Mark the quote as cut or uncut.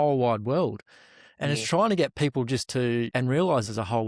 cut